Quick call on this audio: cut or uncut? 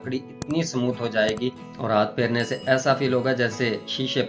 uncut